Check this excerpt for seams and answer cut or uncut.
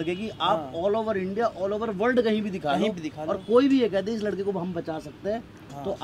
uncut